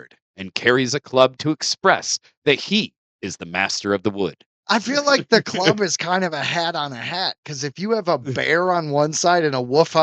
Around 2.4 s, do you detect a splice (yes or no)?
no